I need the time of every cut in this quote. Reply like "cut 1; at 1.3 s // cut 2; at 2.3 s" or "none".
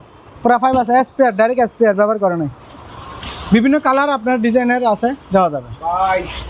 none